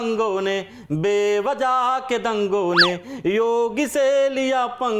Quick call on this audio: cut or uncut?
uncut